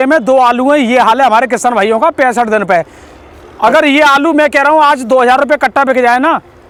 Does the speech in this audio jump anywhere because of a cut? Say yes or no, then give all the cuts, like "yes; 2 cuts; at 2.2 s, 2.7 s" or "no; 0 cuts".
no; 0 cuts